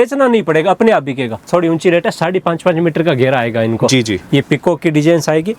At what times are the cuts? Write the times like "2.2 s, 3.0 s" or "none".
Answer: 1.5 s